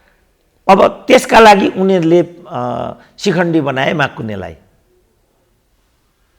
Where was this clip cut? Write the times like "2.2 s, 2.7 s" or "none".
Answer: none